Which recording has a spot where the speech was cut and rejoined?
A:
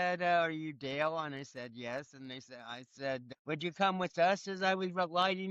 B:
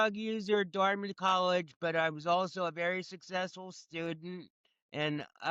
A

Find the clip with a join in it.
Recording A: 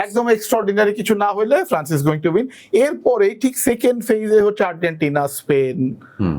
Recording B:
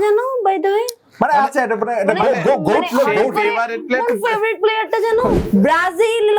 B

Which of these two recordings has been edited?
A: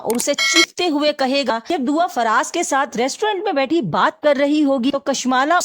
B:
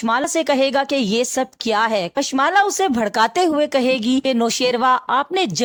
A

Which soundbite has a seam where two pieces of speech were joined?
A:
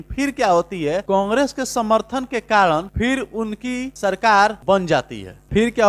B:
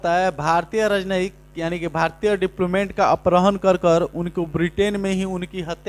A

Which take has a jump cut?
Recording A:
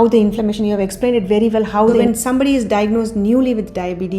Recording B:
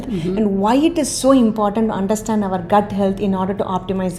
A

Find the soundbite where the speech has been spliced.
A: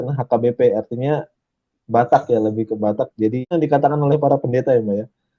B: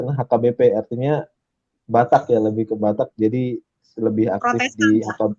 A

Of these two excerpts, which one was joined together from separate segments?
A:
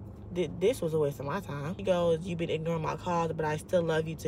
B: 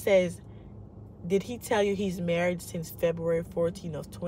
A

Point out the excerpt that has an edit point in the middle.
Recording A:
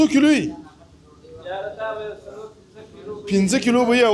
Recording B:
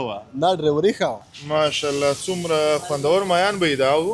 B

